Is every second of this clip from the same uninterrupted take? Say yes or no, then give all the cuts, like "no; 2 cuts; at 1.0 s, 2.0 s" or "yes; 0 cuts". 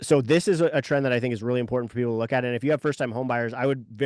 yes; 0 cuts